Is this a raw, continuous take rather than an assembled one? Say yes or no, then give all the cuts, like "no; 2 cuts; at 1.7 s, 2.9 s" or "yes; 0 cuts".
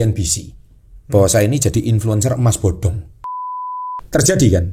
no; 1 cut; at 3.7 s